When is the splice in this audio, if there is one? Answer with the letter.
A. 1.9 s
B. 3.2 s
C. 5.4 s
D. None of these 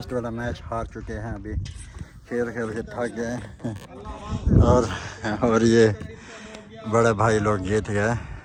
D